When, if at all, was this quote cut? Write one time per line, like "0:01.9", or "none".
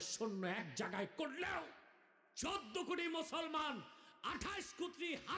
none